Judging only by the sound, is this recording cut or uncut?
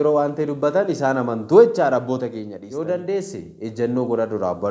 cut